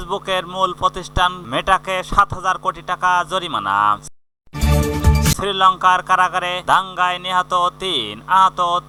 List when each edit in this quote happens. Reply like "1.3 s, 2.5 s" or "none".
none